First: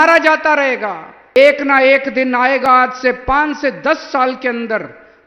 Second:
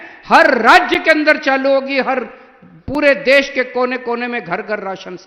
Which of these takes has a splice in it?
first; 1 cut; at 1.4 s

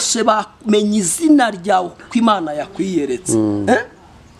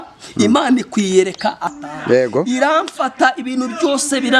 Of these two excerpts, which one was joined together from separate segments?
second; 1 cut; at 1.7 s

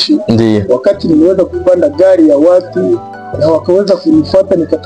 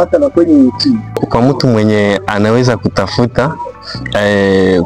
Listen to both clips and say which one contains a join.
second; 1 cut; at 1.2 s

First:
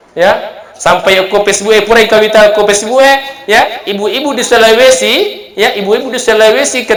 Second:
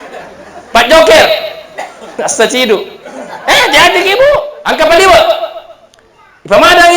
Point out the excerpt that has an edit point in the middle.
second; 1 cut; at 4.6 s

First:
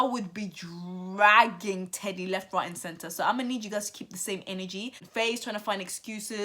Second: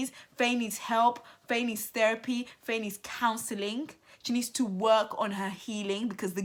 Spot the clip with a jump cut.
first; 1 cut; at 5.0 s

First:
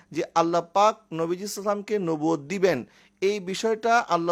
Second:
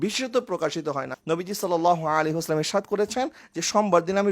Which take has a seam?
second; 1 cut; at 1.1 s

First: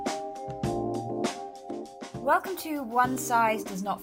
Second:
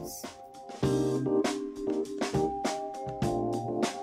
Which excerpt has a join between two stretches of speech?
first; 1 cut; at 2.2 s

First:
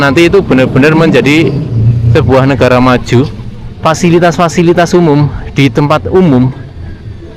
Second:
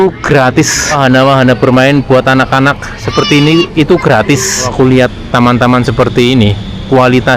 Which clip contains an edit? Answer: second; 2 cuts; at 1.0 s, 4.7 s

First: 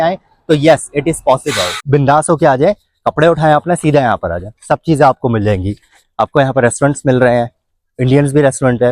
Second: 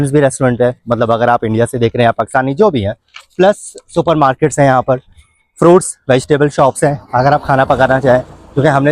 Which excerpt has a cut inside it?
first; 1 cut; at 1.8 s

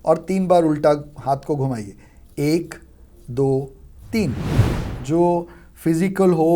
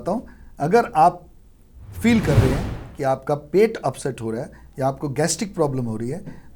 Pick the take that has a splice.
first; 1 cut; at 4.5 s

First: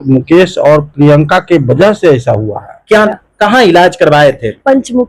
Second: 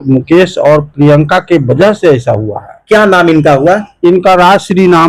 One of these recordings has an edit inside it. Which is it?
first; 1 cut; at 3.1 s

